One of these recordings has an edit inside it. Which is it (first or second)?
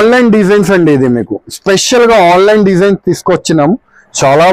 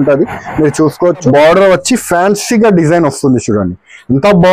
second